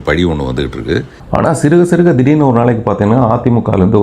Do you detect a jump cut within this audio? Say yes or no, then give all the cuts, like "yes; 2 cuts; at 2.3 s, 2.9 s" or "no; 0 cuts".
yes; 1 cut; at 1.2 s